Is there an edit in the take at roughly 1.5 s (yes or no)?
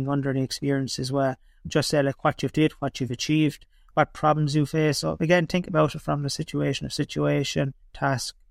yes